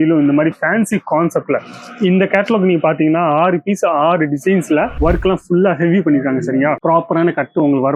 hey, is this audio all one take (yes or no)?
no